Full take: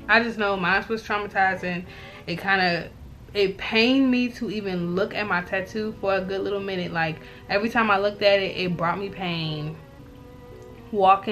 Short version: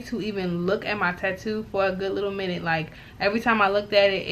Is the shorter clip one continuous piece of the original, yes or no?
yes